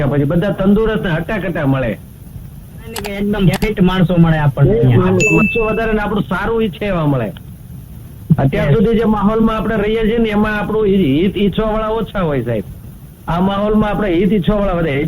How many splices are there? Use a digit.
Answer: 2